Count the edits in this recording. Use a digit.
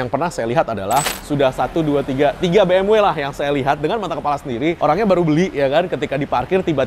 1